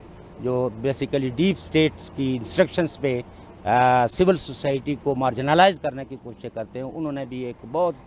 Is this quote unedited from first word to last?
yes; 0 cuts

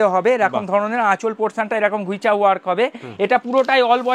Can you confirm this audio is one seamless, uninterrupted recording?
yes; 0 cuts

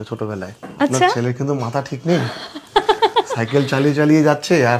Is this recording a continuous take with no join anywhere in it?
yes; 0 cuts

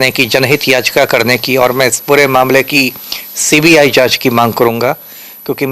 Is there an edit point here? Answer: no; 0 cuts

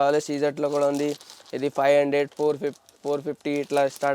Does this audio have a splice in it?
no; 0 cuts

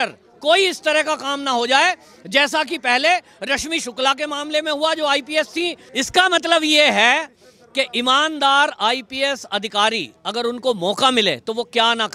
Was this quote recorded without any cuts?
no; 1 cut; at 5.9 s

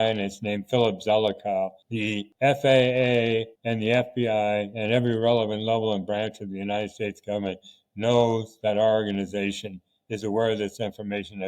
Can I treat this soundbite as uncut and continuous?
no; 2 cuts; at 2.0 s, 3.5 s

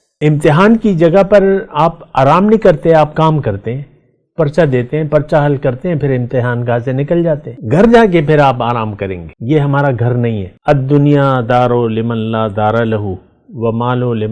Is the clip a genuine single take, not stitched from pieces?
no; 3 cuts; at 7.5 s, 9.3 s, 10.5 s

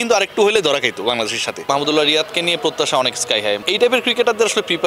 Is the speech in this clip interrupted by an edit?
yes; 2 cuts; at 1.7 s, 3.6 s

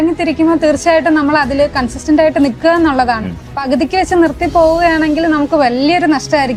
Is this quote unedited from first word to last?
yes; 0 cuts

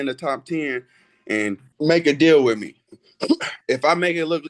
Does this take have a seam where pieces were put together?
yes; 1 cut; at 1.7 s

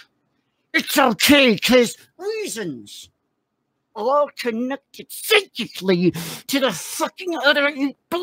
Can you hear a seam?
yes; 1 cut; at 3.9 s

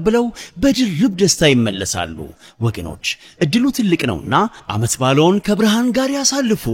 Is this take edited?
no; 0 cuts

